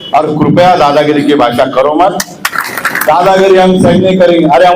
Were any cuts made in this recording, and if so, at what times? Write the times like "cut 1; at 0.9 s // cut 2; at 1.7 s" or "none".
cut 1; at 2.5 s

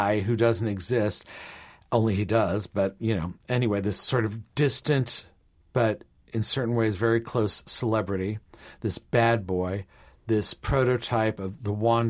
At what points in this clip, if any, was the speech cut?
none

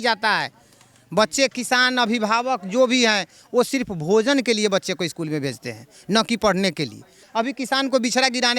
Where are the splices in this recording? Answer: cut 1; at 7.2 s

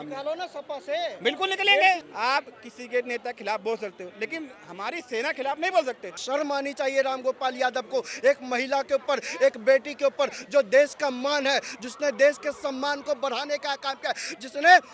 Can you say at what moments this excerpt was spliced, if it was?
cut 1; at 2.1 s // cut 2; at 6.2 s

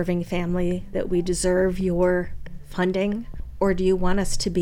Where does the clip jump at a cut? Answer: cut 1; at 3.4 s

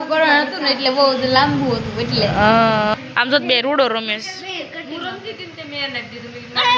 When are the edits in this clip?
cut 1; at 2.9 s

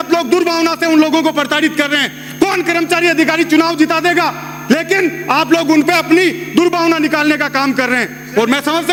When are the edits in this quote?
none

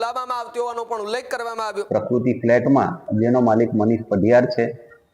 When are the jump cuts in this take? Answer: cut 1; at 1.8 s

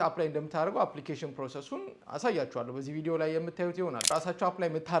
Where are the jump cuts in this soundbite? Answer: cut 1; at 4.1 s

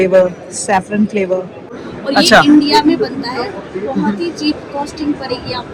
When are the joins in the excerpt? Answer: cut 1; at 1.8 s

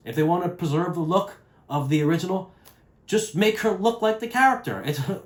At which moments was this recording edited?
none

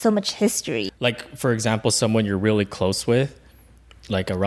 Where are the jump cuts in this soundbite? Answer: cut 1; at 0.9 s

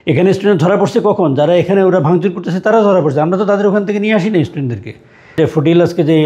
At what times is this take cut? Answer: cut 1; at 5.4 s

